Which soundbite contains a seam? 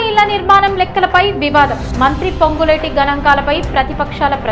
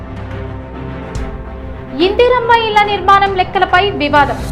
second; 1 cut; at 1.3 s

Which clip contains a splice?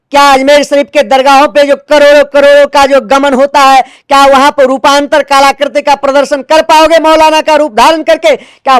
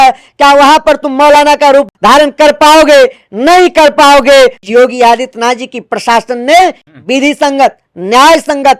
second; 2 cuts; at 1.9 s, 4.6 s

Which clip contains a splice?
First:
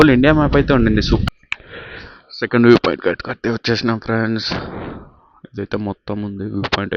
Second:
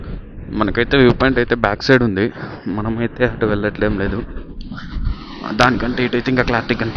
first; 1 cut; at 1.2 s

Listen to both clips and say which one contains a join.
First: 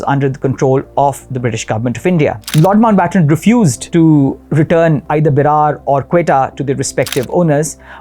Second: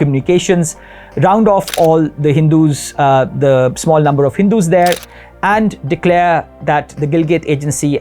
first; 3 cuts; at 2.4 s, 3.8 s, 5.0 s

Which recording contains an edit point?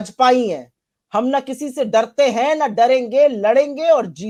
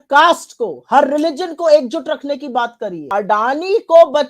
second; 1 cut; at 3.0 s

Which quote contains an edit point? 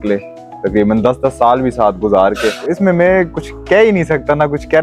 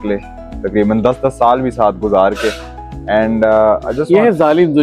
first; 1 cut; at 2.9 s

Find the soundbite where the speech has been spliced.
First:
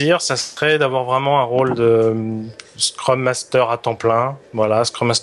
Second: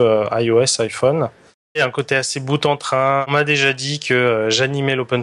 second; 2 cuts; at 1.8 s, 3.3 s

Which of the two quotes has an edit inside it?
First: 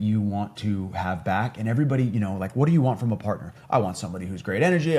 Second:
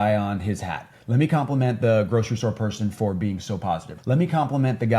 second; 1 cut; at 3.9 s

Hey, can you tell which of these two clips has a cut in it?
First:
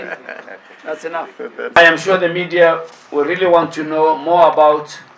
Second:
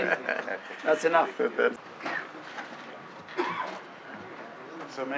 first; 1 cut; at 1.8 s

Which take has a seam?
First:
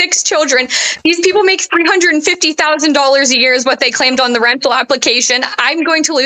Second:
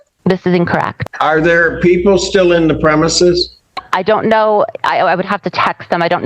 second; 1 cut; at 0.9 s

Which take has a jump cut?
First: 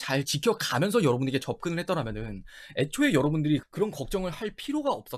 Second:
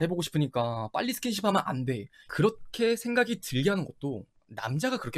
second; 1 cut; at 2.2 s

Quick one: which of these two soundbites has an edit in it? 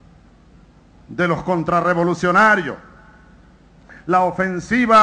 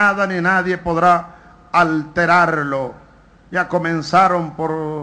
first; 1 cut; at 2.3 s

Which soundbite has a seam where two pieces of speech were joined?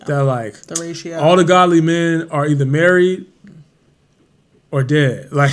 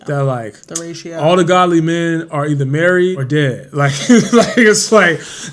second; 1 cut; at 3.2 s

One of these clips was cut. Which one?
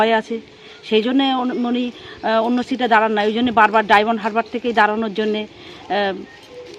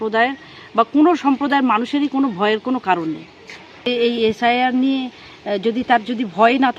second; 1 cut; at 3.9 s

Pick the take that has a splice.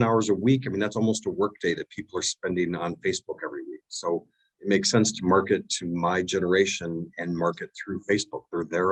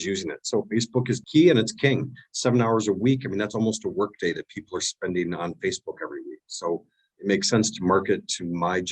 second; 1 cut; at 1.2 s

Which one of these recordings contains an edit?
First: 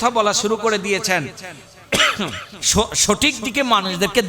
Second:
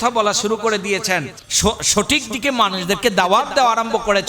second; 1 cut; at 1.4 s

